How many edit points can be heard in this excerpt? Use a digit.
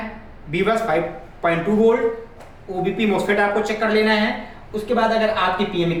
0